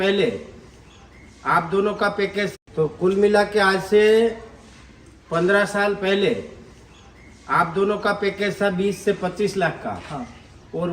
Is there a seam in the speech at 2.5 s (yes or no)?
yes